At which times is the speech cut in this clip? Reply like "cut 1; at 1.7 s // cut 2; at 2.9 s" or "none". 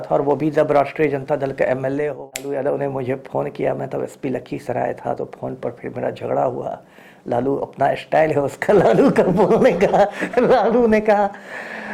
cut 1; at 2.5 s